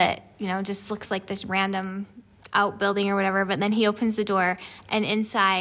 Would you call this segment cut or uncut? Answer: uncut